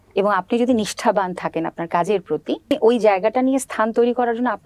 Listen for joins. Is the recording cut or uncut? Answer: cut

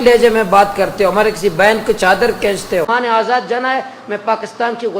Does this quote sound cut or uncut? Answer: cut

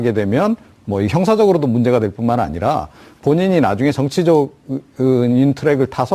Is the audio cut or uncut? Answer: cut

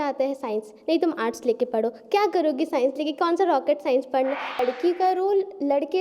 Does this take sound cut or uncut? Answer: cut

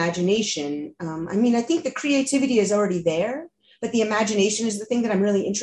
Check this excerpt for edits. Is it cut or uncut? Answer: uncut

